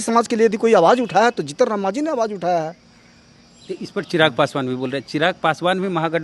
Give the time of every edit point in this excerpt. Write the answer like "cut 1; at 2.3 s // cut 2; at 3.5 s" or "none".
none

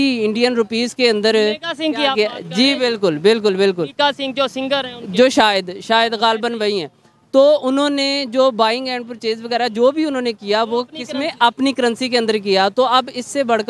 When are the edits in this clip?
none

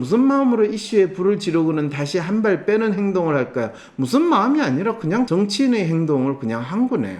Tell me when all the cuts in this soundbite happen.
cut 1; at 5.3 s

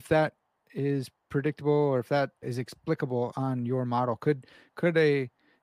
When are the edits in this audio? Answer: cut 1; at 2.4 s

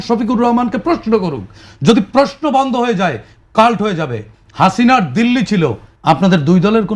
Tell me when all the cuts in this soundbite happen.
cut 1; at 5.9 s

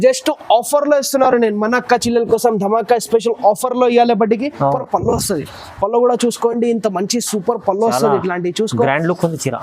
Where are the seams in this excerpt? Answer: cut 1; at 4.8 s

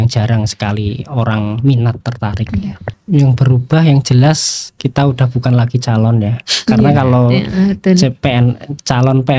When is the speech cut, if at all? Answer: cut 1; at 2.8 s

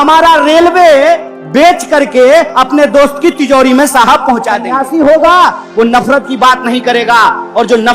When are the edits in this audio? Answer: cut 1; at 4.8 s

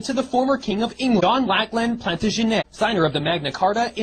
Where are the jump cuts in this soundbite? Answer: cut 1; at 1.2 s // cut 2; at 2.7 s

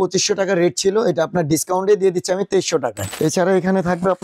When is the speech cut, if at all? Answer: cut 1; at 3.0 s

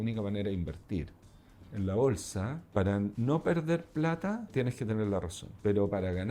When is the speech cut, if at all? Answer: cut 1; at 1.6 s // cut 2; at 2.6 s // cut 3; at 3.1 s // cut 4; at 4.5 s // cut 5; at 5.4 s

